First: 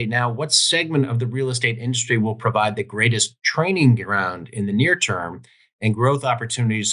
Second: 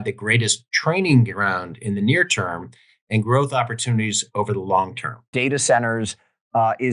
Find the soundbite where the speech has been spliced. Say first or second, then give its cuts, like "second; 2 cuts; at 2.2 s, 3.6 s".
second; 1 cut; at 5.3 s